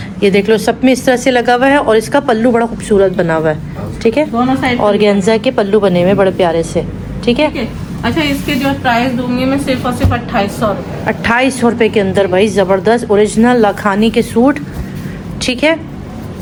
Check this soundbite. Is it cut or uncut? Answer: uncut